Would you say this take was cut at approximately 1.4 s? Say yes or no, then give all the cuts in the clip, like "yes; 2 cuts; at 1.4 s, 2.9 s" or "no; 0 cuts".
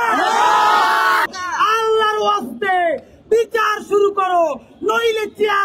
yes; 1 cut; at 1.4 s